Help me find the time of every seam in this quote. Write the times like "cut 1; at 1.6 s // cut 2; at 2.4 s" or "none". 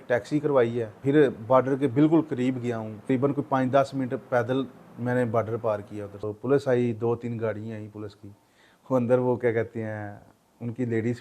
cut 1; at 0.9 s // cut 2; at 3.1 s // cut 3; at 6.3 s